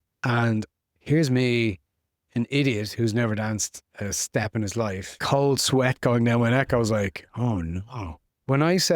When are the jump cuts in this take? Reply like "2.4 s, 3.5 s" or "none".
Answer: 5.2 s, 7.7 s